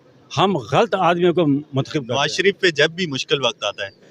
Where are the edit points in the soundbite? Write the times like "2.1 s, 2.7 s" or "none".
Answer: 2.1 s